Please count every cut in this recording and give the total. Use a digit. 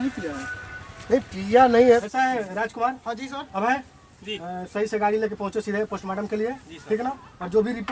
1